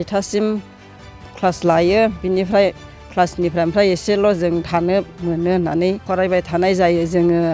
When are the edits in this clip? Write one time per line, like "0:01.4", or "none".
0:06.0